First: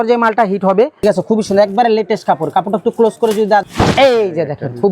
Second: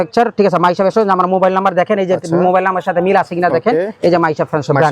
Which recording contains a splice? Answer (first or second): first